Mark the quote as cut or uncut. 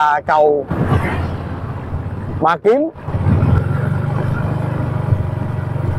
uncut